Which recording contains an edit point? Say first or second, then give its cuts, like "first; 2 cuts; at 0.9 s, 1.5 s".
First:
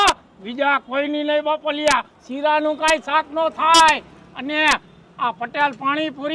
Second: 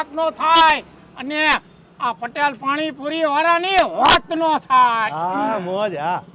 first; 1 cut; at 2.2 s